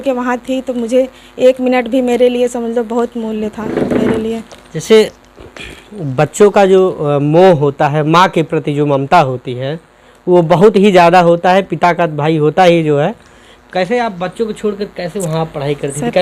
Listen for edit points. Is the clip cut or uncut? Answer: uncut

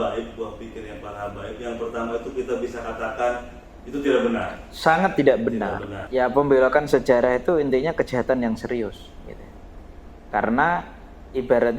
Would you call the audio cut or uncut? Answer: cut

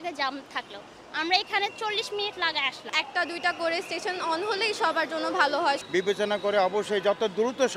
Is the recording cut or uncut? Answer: cut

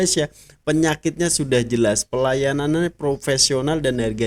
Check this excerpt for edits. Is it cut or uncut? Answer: uncut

